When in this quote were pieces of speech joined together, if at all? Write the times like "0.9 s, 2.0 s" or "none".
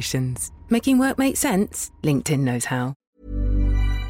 3.1 s

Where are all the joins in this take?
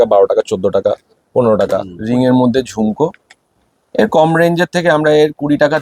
1.9 s

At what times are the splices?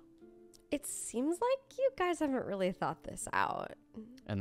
none

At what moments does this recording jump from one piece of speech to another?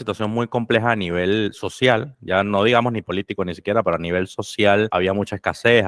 none

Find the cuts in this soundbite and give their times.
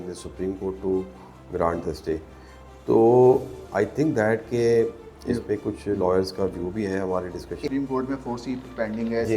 7.6 s

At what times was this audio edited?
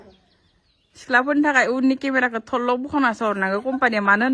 none

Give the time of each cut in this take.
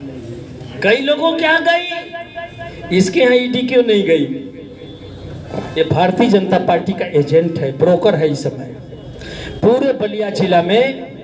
none

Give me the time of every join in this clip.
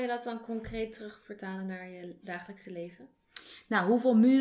none

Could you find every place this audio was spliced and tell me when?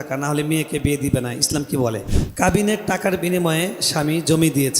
2.1 s

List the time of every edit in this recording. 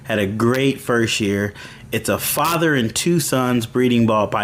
none

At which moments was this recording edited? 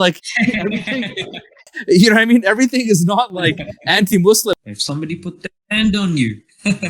4.6 s

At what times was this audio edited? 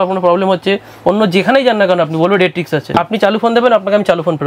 2.9 s

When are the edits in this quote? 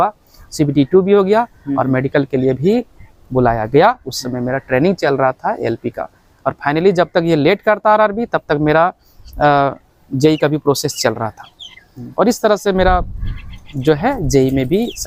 none

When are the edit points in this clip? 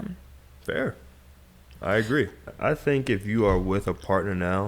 2.4 s

